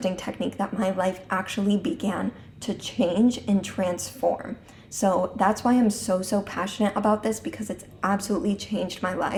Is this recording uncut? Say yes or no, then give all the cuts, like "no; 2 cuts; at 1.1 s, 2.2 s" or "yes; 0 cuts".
yes; 0 cuts